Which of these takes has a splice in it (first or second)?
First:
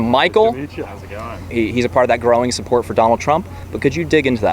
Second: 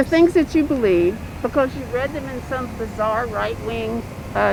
first